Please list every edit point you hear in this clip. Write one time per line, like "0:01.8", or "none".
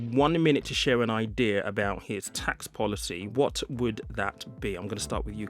0:03.3